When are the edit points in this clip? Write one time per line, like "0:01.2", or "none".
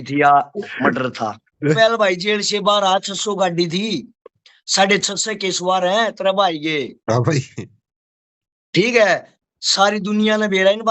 0:01.8